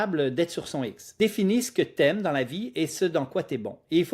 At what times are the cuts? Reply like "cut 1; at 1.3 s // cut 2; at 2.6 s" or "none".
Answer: cut 1; at 1.0 s